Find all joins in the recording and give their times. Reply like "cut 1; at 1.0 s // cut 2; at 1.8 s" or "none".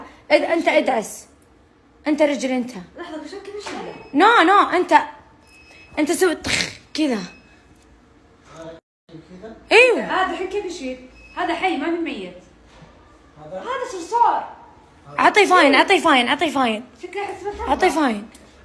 none